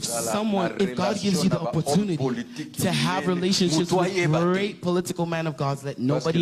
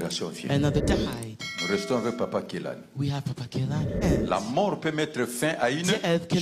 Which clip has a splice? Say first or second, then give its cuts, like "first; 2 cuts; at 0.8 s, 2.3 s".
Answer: second; 2 cuts; at 0.8 s, 4.0 s